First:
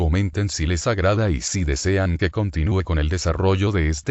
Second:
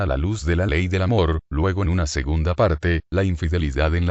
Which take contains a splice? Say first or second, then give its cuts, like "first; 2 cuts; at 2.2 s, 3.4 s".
second; 1 cut; at 1.1 s